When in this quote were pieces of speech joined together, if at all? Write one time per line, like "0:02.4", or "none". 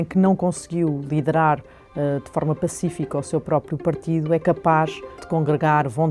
0:05.1